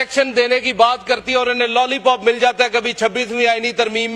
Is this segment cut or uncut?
uncut